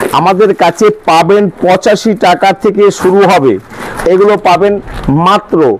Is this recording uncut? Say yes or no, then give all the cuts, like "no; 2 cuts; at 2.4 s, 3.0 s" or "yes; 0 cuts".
no; 1 cut; at 3.9 s